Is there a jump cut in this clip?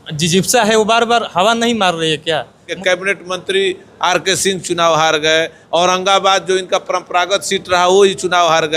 yes; 1 cut; at 2.7 s

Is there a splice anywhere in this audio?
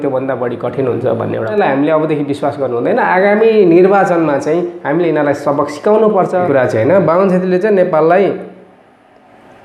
yes; 2 cuts; at 1.6 s, 6.5 s

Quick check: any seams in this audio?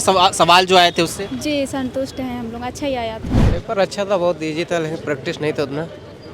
yes; 1 cut; at 3.4 s

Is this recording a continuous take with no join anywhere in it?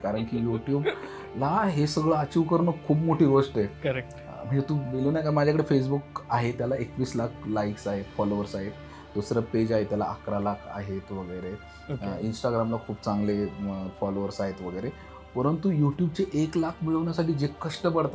yes; 0 cuts

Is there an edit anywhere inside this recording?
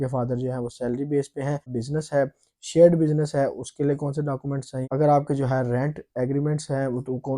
yes; 2 cuts; at 1.7 s, 4.9 s

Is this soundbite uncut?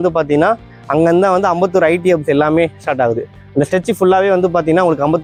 yes; 0 cuts

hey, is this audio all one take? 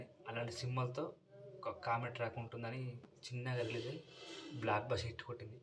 no; 1 cut; at 3.1 s

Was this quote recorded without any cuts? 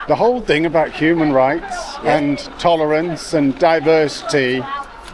yes; 0 cuts

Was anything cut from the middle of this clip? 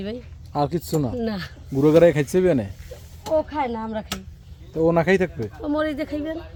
no; 0 cuts

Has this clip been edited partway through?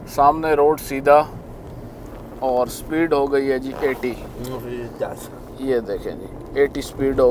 no; 0 cuts

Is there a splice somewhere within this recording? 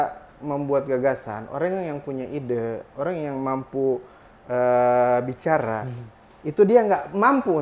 no; 0 cuts

